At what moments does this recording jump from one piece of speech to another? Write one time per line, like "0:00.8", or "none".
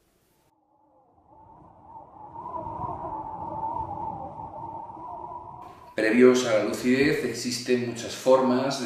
0:04.5